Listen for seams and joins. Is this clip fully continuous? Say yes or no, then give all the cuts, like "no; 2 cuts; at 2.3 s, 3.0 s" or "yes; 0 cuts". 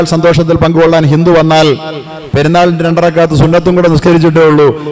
no; 1 cut; at 4.0 s